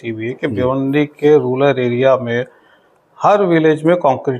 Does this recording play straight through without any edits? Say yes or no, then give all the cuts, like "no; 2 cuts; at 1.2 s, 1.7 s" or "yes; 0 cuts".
yes; 0 cuts